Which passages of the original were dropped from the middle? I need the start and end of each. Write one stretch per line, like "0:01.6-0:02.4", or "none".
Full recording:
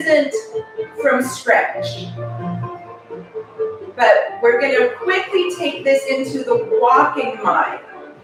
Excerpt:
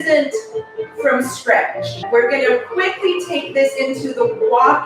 0:02.0-0:04.3